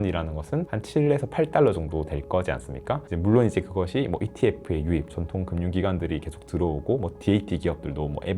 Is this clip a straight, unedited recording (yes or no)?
no